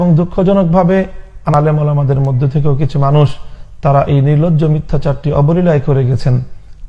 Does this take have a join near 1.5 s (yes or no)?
yes